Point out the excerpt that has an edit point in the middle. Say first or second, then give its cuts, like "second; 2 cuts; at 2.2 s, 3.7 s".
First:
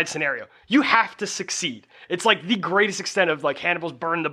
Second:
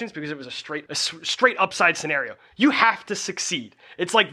second; 1 cut; at 0.9 s